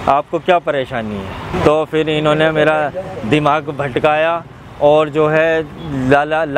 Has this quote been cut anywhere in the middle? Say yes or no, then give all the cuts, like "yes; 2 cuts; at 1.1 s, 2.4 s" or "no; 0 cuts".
yes; 1 cut; at 1.5 s